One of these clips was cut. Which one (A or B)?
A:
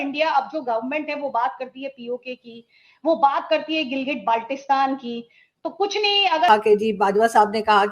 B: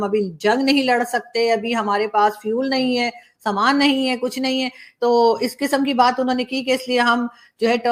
A